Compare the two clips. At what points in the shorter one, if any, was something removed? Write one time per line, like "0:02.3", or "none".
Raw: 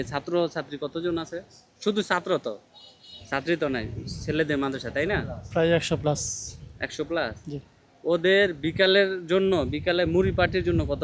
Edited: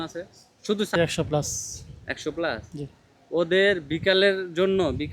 0:01.0